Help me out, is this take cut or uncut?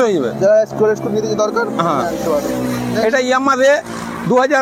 uncut